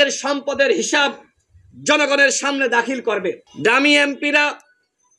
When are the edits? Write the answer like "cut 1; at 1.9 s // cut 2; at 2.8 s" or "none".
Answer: cut 1; at 3.5 s